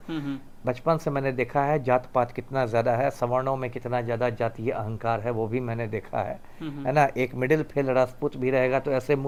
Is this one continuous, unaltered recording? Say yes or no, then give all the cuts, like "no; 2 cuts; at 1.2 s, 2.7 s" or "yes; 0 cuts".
yes; 0 cuts